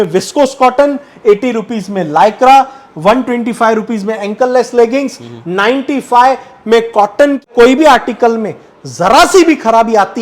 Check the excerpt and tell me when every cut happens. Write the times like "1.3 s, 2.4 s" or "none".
7.5 s